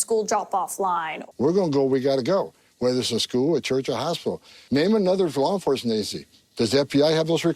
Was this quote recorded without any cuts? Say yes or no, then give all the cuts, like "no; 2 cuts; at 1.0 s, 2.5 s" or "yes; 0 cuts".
no; 2 cuts; at 1.2 s, 4.5 s